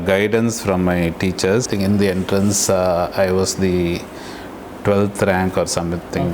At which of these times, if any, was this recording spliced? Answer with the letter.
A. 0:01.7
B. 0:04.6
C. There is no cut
A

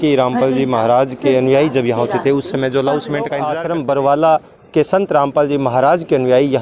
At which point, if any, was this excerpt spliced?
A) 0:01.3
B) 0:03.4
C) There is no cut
B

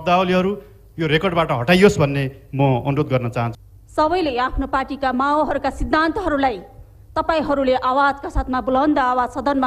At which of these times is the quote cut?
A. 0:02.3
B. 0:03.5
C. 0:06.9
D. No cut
B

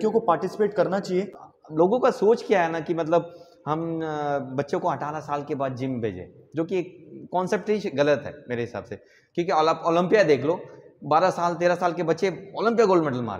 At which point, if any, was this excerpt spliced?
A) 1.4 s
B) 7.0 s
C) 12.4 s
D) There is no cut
A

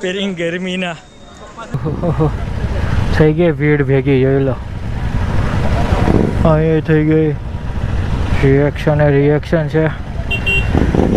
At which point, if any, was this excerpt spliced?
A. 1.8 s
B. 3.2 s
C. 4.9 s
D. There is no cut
A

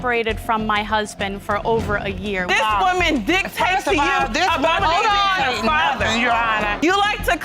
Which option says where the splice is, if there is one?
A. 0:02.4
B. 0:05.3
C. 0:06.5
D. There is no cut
A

